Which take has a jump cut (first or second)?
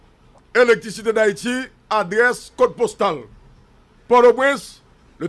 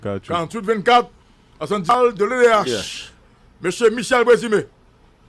second